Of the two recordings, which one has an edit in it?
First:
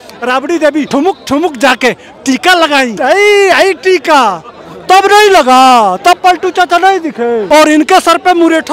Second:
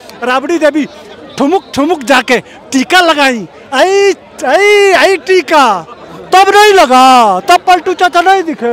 first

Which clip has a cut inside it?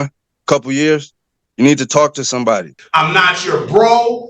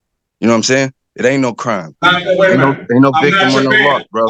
first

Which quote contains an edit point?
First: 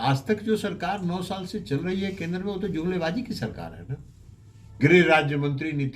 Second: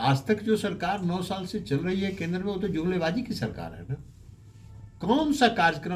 first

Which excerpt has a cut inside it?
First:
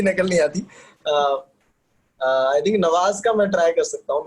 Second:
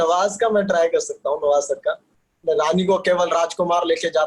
second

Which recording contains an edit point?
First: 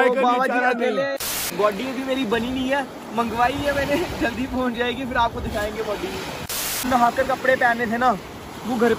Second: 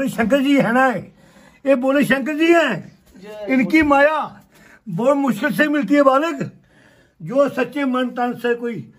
first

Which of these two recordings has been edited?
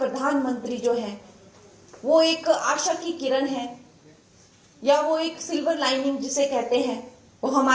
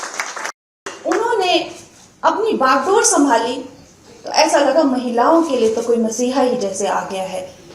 second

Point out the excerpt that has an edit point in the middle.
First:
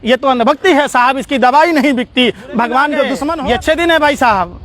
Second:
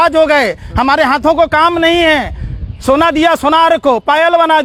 first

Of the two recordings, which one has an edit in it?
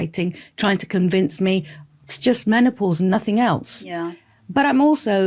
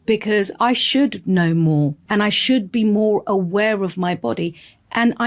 second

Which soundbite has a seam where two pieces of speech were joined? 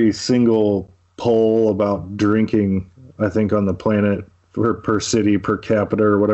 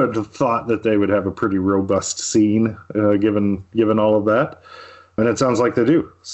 second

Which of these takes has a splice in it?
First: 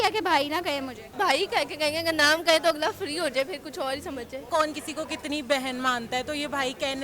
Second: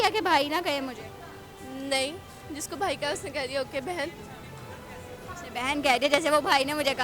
first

